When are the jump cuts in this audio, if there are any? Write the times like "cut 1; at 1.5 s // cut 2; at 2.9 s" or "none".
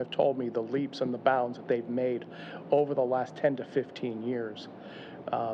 none